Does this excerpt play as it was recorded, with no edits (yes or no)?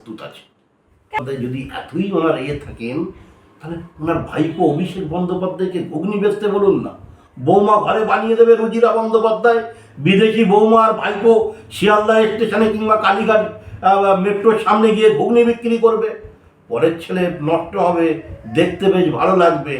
no